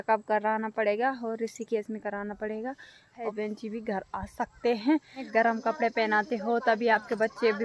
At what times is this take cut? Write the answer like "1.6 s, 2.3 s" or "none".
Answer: 3.2 s, 5.3 s